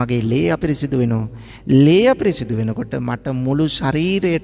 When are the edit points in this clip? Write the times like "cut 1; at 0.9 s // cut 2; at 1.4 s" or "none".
none